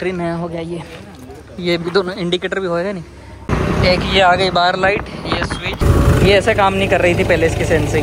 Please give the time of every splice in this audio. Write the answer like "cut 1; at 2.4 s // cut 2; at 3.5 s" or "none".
cut 1; at 3.5 s // cut 2; at 5.8 s

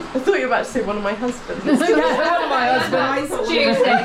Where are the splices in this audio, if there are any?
none

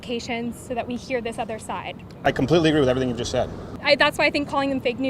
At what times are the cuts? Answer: cut 1; at 3.7 s

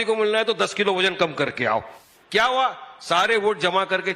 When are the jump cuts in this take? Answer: cut 1; at 2.0 s

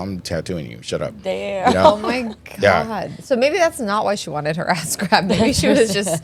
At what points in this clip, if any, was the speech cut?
none

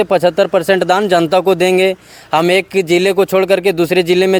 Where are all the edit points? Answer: none

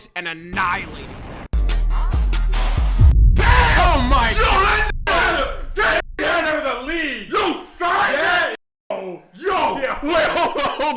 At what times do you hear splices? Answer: cut 1; at 0.9 s

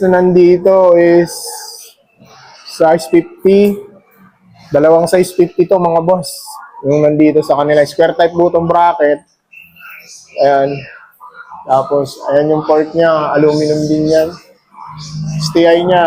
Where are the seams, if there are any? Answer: none

